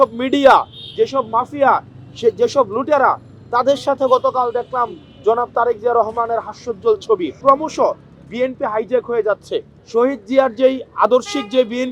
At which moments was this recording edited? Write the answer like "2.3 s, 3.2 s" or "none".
7.4 s, 9.8 s